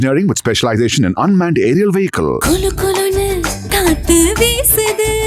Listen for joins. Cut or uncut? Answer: uncut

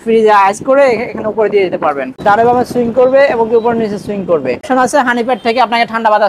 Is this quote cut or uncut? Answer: cut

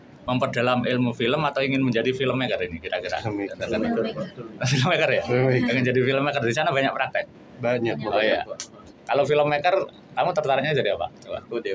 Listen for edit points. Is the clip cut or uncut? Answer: uncut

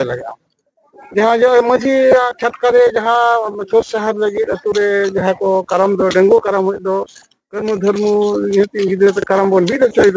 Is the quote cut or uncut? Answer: uncut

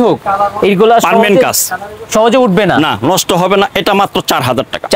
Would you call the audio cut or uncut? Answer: uncut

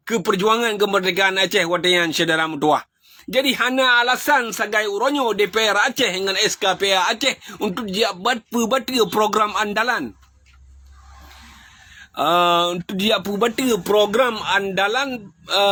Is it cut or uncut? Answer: uncut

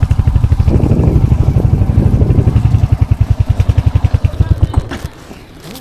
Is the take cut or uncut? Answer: cut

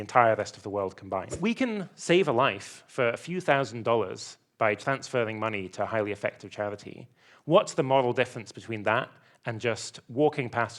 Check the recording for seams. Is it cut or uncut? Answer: cut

